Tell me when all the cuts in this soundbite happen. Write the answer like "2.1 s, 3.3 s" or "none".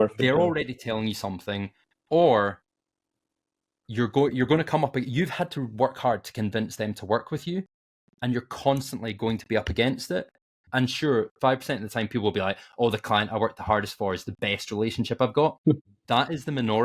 15.9 s